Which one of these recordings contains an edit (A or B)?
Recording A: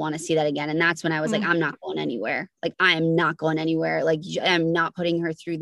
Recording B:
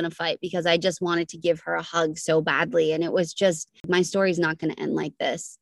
B